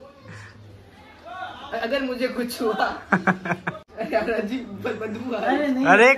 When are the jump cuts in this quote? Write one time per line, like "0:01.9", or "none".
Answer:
0:03.8

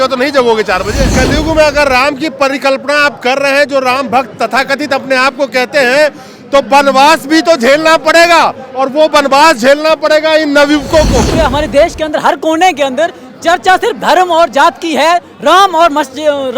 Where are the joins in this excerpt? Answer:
0:01.1
0:11.3

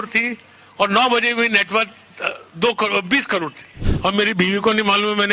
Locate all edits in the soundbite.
0:03.8

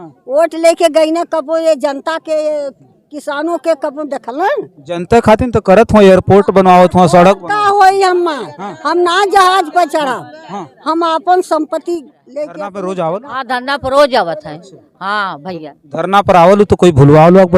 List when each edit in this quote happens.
0:12.6

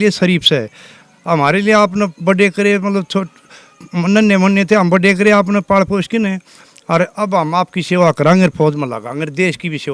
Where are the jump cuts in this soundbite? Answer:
none

